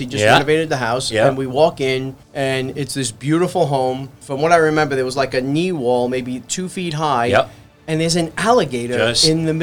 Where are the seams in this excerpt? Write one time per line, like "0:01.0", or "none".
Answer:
0:02.2
0:04.2